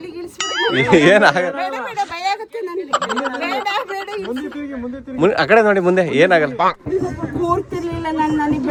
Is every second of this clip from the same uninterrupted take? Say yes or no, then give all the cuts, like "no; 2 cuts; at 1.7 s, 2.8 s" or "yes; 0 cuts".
yes; 0 cuts